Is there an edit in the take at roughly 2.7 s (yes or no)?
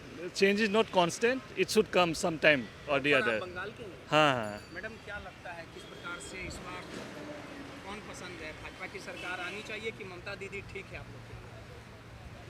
no